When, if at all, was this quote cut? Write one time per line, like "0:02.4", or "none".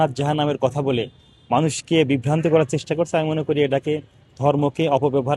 none